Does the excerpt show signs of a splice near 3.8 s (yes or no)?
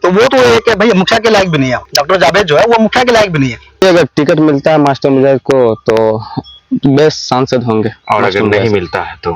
yes